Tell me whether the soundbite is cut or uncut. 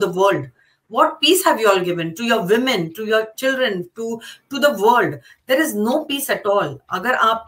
uncut